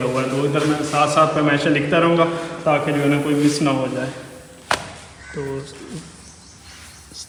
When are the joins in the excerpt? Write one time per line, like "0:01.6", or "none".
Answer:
none